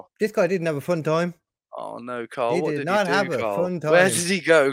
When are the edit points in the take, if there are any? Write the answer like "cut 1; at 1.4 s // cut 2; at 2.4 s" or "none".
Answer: none